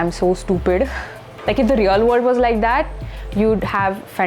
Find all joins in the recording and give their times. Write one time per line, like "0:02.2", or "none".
0:01.3